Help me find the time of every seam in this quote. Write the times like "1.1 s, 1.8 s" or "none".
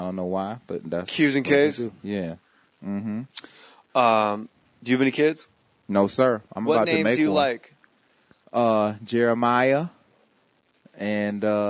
none